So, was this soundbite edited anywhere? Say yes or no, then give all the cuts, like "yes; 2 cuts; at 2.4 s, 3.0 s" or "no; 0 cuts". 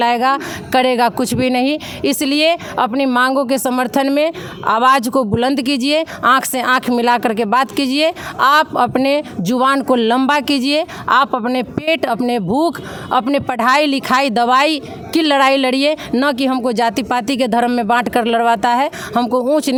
no; 0 cuts